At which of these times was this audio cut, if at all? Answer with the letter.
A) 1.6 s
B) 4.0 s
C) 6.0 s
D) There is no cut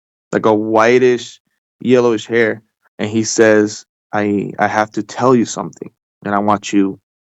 B